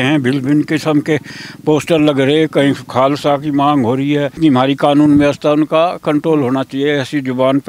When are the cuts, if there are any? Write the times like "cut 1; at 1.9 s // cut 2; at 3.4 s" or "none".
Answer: cut 1; at 4.4 s